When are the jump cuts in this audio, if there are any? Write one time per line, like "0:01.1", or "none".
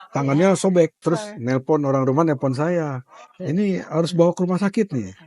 0:01.0